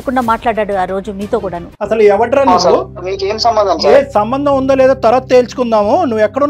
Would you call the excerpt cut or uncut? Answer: uncut